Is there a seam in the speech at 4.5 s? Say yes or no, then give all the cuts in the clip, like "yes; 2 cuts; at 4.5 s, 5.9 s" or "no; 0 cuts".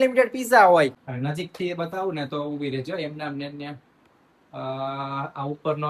no; 1 cut; at 1.1 s